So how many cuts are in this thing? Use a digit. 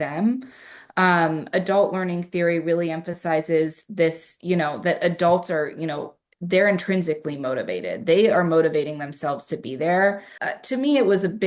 1